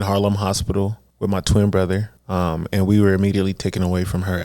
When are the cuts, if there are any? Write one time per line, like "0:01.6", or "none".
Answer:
0:01.0
0:02.2